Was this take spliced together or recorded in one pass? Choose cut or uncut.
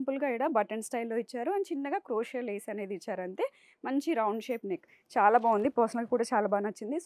uncut